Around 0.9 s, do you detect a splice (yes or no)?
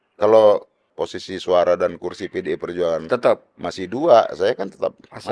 yes